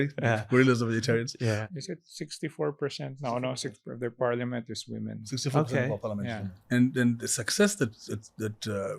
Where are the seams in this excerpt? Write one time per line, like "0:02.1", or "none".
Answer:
0:01.6
0:06.5

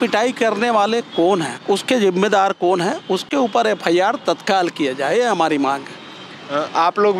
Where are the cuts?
none

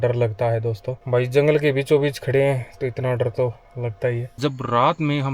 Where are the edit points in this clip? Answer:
0:04.3

